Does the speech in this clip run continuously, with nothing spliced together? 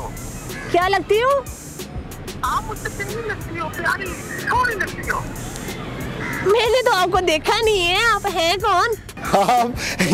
no; 1 cut; at 9.1 s

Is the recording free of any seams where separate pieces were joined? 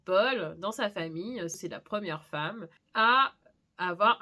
no; 2 cuts; at 1.6 s, 2.7 s

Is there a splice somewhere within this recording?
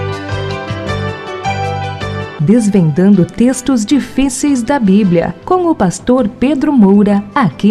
yes; 1 cut; at 2.0 s

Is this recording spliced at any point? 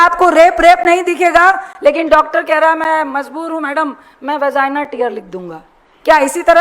no; 0 cuts

